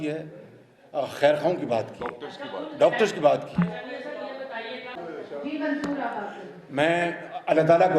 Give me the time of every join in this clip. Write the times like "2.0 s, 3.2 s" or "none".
4.9 s

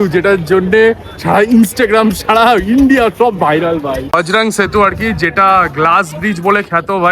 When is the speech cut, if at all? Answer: 4.1 s

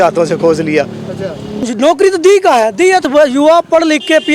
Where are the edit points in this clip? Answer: 1.7 s, 3.1 s

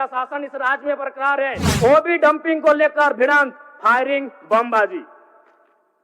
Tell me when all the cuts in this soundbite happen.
1.6 s

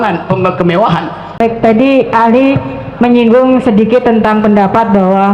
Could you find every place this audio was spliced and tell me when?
1.4 s

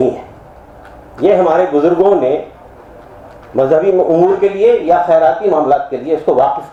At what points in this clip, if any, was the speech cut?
none

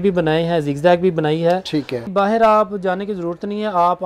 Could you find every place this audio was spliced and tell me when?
2.1 s

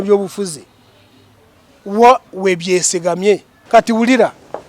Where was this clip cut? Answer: 3.5 s

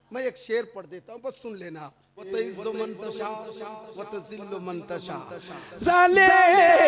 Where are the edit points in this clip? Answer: 2.3 s, 5.9 s

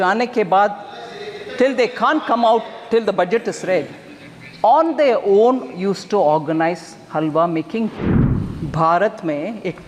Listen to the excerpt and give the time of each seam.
8.0 s

